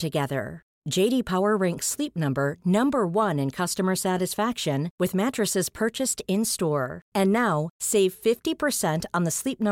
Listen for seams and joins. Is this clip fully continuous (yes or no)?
yes